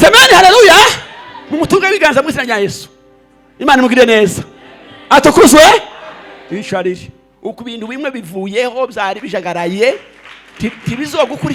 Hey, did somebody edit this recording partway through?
no; 0 cuts

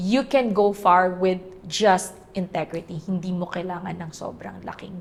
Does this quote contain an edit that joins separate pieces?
no; 0 cuts

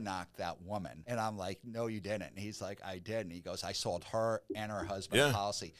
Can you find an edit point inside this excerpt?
yes; 1 cut; at 1.0 s

